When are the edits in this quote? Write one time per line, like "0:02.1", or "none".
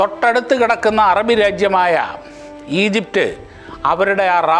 none